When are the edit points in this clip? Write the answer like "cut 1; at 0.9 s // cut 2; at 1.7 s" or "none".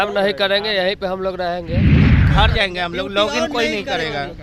cut 1; at 1.7 s // cut 2; at 2.3 s